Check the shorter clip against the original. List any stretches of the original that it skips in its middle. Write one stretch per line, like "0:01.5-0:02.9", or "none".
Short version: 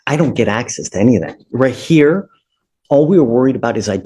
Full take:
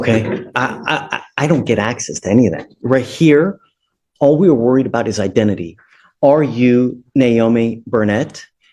none

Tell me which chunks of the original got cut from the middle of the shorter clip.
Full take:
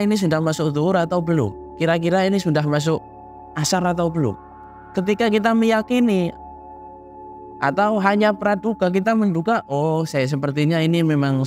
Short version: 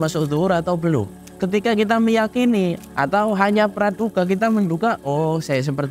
0:01.6-0:04.7
0:06.4-0:07.5

